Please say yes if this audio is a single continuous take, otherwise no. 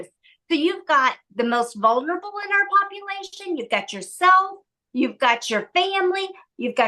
yes